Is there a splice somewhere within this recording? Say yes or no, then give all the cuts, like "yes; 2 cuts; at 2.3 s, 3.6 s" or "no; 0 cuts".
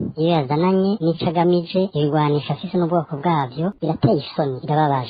yes; 1 cut; at 3.8 s